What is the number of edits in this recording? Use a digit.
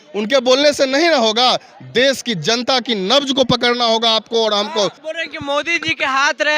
1